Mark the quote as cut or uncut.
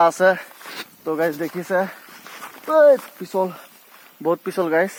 uncut